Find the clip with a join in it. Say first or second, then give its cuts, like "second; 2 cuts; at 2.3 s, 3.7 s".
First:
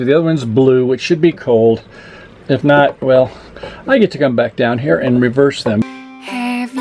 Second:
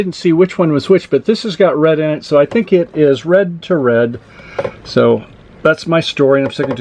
first; 1 cut; at 5.8 s